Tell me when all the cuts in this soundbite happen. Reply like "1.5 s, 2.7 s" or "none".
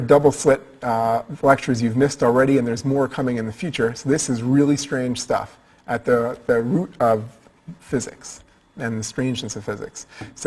6.9 s